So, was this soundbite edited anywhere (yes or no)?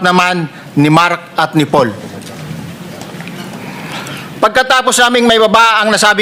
no